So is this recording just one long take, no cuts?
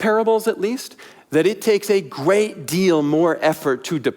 yes; 0 cuts

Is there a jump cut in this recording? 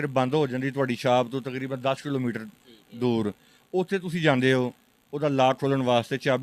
no; 0 cuts

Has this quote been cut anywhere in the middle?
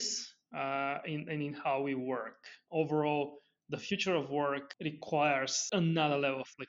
yes; 2 cuts; at 4.7 s, 5.6 s

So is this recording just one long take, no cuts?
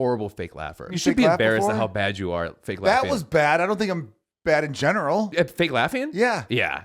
no; 2 cuts; at 0.9 s, 5.3 s

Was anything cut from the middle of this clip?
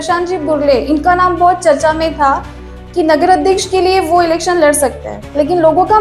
no; 0 cuts

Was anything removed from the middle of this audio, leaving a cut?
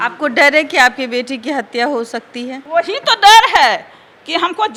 no; 0 cuts

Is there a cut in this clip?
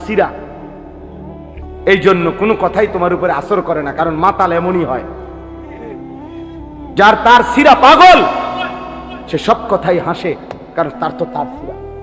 yes; 2 cuts; at 5.0 s, 7.0 s

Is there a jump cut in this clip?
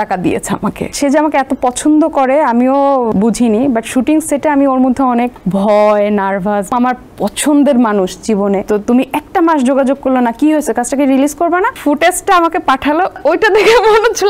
yes; 7 cuts; at 0.9 s, 3.1 s, 5.4 s, 6.7 s, 8.6 s, 11.8 s, 13.2 s

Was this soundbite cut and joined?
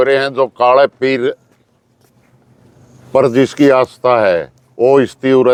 no; 0 cuts

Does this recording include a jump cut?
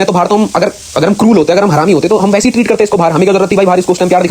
no; 0 cuts

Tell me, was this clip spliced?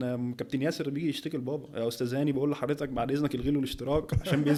no; 0 cuts

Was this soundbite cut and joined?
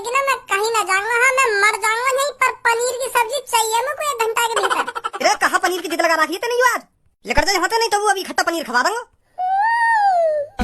yes; 1 cut; at 9.2 s

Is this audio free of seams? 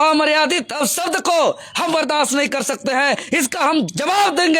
yes; 0 cuts

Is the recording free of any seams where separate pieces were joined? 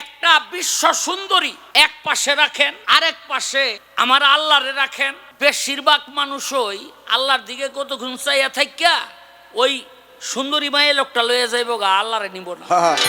no; 4 cuts; at 1.6 s, 2.8 s, 3.8 s, 5.2 s

